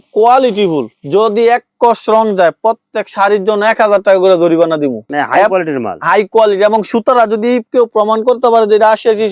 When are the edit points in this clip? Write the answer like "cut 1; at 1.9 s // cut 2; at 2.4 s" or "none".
none